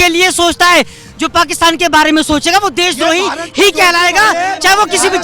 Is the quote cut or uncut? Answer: uncut